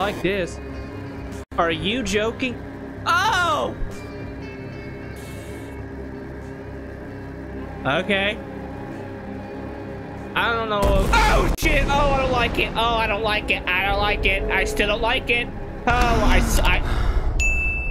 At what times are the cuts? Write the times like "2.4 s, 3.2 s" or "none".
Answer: none